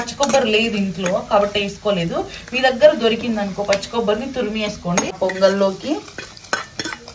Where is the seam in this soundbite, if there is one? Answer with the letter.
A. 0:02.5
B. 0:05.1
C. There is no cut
C